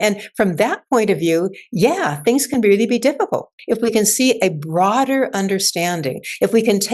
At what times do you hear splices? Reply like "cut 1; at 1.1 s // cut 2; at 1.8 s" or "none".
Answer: cut 1; at 3.5 s